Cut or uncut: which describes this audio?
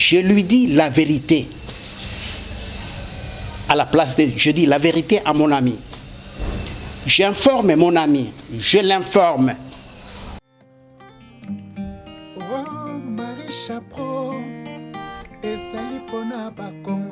cut